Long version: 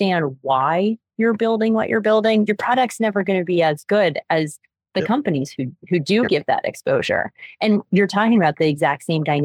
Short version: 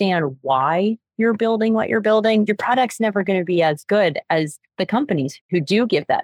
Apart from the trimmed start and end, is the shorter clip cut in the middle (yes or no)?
yes